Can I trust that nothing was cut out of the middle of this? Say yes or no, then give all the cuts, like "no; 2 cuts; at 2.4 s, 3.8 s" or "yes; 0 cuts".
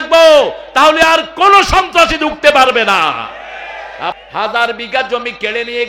no; 1 cut; at 4.2 s